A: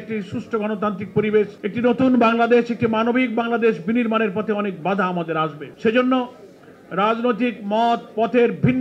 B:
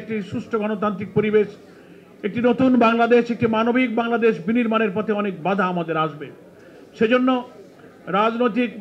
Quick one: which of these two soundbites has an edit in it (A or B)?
A